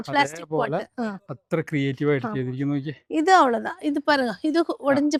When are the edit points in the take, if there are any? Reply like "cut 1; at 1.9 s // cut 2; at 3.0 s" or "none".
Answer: none

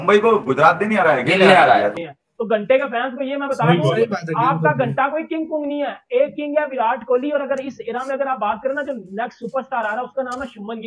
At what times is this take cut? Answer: cut 1; at 2.0 s

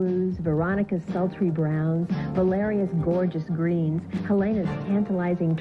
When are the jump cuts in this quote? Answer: cut 1; at 3.5 s

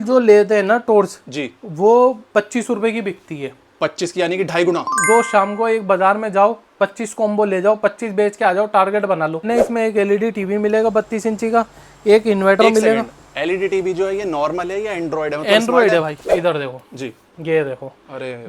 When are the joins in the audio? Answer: cut 1; at 5.1 s // cut 2; at 9.5 s // cut 3; at 16.3 s

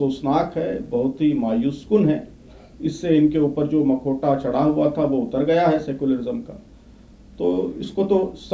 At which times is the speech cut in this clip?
none

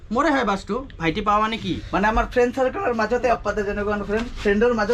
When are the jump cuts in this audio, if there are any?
cut 1; at 1.8 s // cut 2; at 3.3 s

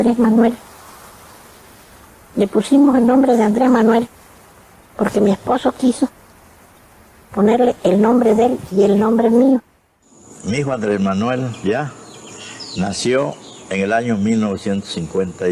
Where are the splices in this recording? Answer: cut 1; at 3.2 s

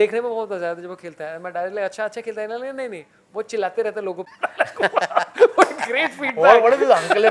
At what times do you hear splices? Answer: cut 1; at 4.3 s

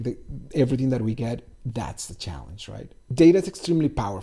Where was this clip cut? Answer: cut 1; at 3.1 s

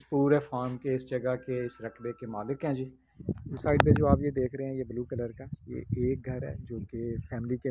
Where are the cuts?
cut 1; at 3.1 s

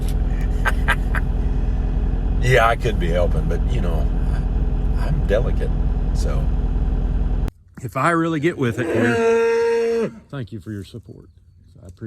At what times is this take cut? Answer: cut 1; at 7.5 s

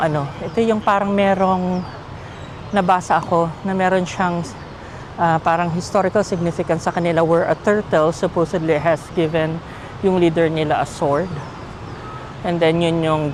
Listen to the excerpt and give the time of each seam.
none

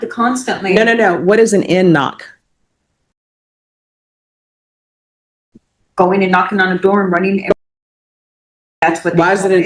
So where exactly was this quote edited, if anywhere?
none

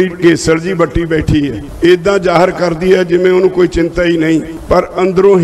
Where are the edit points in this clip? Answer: cut 1; at 1.6 s // cut 2; at 4.5 s

